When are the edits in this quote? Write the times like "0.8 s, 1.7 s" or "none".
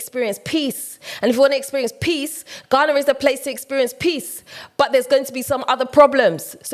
none